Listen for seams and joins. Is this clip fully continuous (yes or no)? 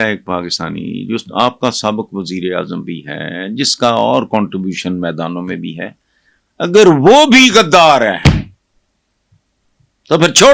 yes